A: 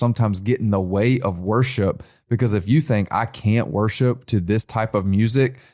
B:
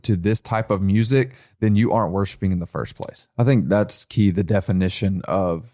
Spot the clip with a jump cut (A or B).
B